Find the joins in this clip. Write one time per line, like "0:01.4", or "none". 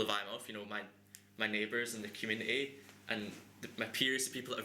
none